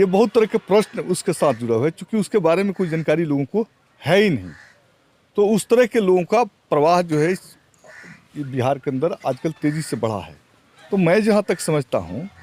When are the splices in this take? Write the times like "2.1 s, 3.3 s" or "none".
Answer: none